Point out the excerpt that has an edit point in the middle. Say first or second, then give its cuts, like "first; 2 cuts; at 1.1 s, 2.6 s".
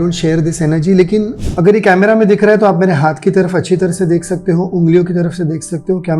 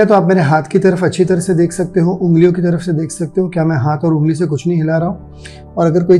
first; 1 cut; at 1.4 s